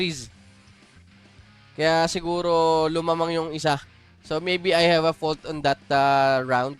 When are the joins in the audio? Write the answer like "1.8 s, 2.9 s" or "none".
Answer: none